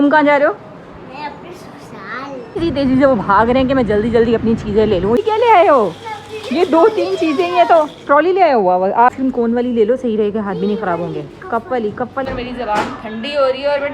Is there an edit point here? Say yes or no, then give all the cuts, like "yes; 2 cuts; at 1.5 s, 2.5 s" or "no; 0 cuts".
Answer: yes; 4 cuts; at 2.6 s, 5.2 s, 9.1 s, 12.3 s